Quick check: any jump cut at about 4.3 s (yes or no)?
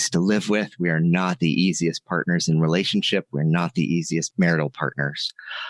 yes